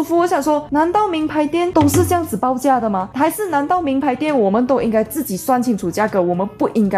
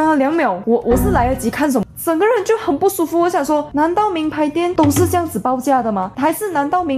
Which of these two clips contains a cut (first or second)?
second